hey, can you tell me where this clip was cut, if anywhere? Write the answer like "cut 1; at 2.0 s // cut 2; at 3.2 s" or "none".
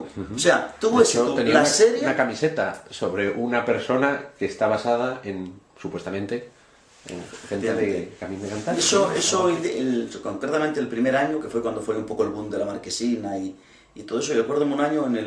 cut 1; at 10.2 s